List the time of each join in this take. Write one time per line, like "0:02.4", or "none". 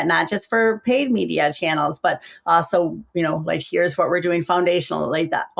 none

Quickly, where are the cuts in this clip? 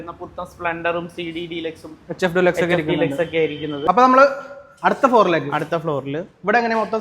0:03.8

